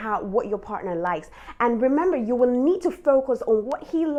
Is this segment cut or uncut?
uncut